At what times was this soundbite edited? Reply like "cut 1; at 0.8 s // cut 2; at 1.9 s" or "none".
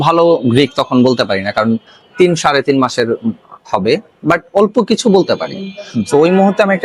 none